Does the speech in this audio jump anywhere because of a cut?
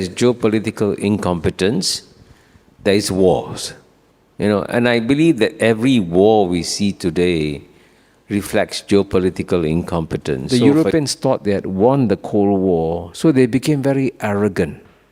yes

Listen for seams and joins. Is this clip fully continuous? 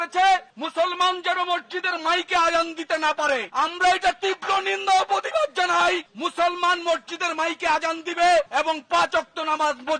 yes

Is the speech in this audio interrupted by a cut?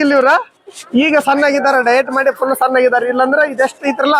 no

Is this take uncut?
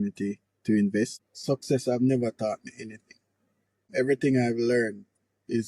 no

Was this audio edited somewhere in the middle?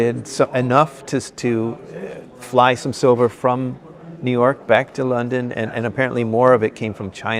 no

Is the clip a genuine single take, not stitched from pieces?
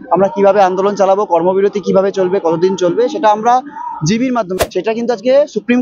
no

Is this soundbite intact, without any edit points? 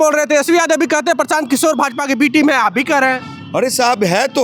yes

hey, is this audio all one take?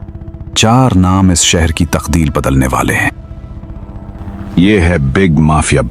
no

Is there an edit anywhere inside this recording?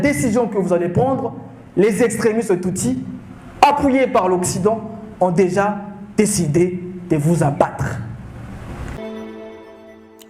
yes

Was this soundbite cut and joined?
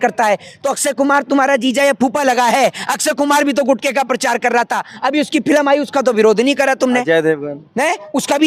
no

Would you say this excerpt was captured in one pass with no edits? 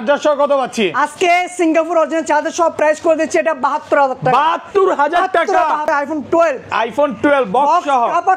no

